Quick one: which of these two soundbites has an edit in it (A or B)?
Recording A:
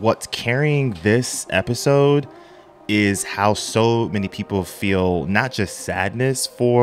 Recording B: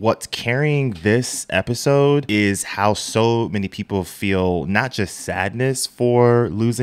B